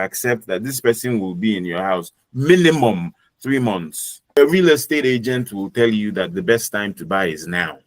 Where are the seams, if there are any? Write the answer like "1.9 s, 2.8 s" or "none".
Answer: 4.4 s